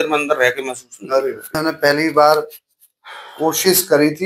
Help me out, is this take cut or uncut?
cut